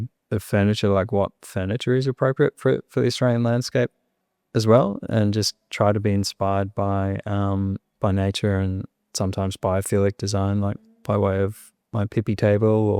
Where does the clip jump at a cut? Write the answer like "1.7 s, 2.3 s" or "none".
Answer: none